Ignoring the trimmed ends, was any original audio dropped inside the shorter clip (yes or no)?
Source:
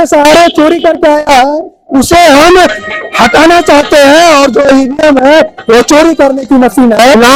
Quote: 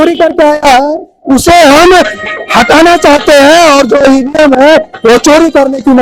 no